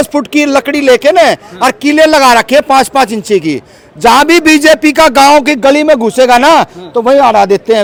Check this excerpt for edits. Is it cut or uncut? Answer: uncut